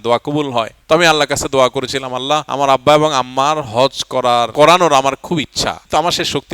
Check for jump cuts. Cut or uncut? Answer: uncut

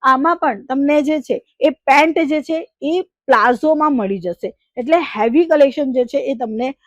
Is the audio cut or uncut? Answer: uncut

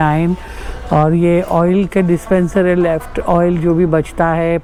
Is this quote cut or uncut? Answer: uncut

